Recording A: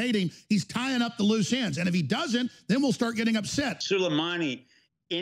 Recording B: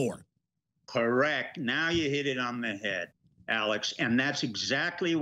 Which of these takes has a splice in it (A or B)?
A